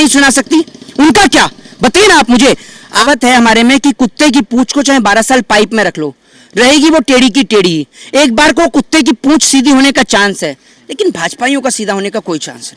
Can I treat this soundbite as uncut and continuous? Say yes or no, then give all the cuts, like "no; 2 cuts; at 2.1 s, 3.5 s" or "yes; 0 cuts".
no; 1 cut; at 3.0 s